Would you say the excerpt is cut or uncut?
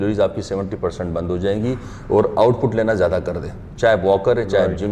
uncut